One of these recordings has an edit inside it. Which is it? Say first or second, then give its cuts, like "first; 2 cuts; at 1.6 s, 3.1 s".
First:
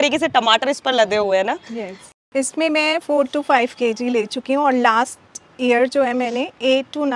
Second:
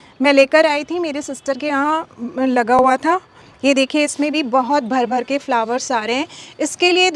first; 1 cut; at 2.1 s